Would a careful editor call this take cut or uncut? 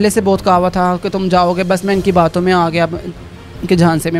uncut